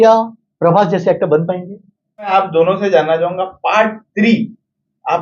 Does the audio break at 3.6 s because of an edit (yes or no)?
no